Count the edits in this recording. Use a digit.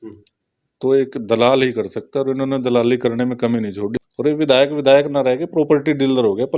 1